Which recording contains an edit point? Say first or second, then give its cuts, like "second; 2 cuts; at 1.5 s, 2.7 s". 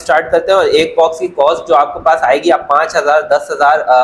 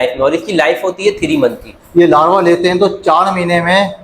second; 1 cut; at 1.8 s